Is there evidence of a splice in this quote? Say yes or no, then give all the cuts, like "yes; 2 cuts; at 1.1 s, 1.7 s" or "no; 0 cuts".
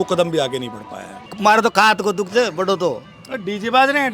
yes; 1 cut; at 1.3 s